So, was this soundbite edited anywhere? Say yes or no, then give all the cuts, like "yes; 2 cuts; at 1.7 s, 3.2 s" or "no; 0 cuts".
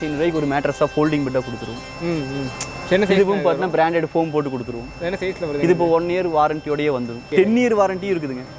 yes; 1 cut; at 7.3 s